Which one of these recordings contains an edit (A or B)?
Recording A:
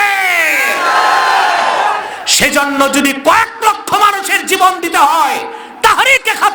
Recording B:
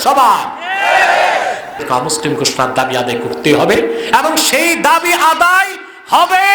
B